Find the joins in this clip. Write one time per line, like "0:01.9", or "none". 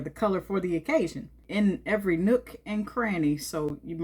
0:01.4